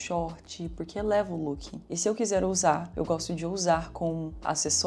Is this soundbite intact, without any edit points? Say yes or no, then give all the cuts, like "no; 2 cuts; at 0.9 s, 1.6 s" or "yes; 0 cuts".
no; 1 cut; at 1.8 s